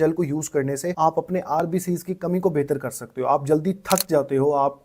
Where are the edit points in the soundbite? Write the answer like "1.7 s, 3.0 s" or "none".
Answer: 0.9 s